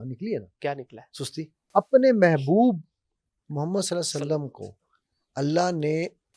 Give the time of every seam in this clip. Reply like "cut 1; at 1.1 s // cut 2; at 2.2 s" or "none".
cut 1; at 1.6 s